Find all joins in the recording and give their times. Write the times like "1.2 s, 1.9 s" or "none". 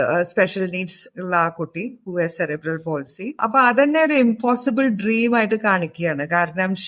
3.4 s